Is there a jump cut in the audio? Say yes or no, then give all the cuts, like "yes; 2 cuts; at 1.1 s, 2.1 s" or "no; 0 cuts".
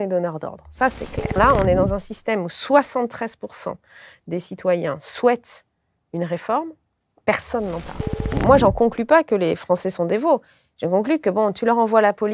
yes; 2 cuts; at 1.4 s, 8.3 s